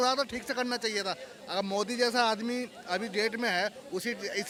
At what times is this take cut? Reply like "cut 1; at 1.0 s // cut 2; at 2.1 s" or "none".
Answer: none